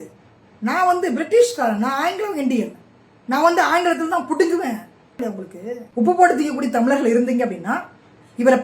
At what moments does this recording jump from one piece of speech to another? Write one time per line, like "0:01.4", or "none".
0:05.2